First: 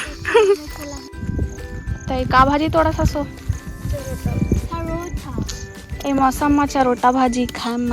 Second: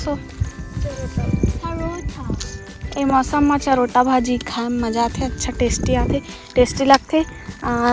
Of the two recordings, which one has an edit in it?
first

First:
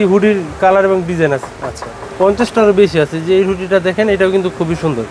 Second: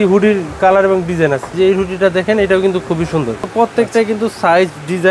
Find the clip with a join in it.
second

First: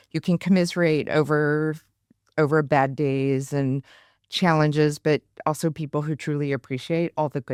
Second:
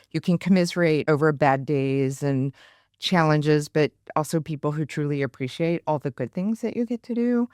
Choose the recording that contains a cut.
second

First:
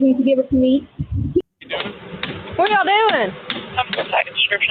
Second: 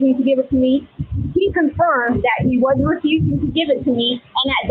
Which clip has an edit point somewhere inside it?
first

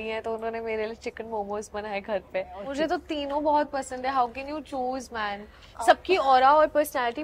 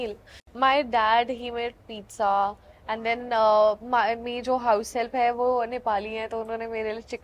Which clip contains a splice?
first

